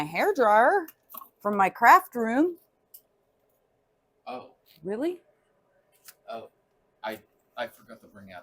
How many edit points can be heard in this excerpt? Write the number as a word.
one